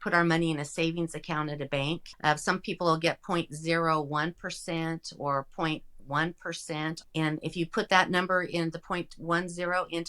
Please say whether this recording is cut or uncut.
cut